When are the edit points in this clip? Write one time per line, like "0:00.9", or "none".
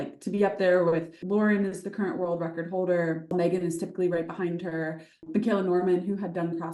0:01.2
0:03.3
0:05.3